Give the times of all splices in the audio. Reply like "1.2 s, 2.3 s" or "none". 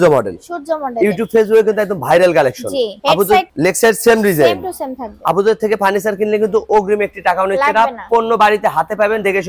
none